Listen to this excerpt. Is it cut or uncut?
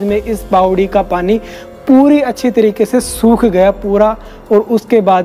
uncut